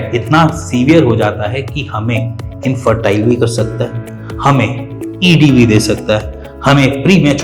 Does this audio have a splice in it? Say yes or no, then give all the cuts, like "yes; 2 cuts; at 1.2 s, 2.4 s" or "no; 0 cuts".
no; 0 cuts